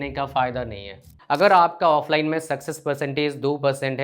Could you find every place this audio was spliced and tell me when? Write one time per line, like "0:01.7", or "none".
0:01.1